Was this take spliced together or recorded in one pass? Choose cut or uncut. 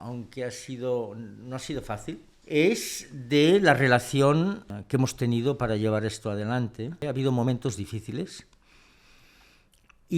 cut